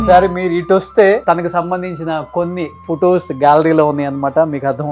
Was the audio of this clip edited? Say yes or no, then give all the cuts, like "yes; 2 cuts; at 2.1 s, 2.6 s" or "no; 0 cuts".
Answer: yes; 1 cut; at 1.2 s